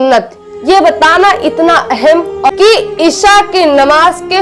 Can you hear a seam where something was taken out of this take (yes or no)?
yes